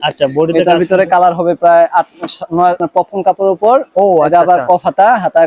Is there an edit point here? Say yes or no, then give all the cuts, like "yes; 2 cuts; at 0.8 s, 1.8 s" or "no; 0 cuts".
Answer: yes; 1 cut; at 2.8 s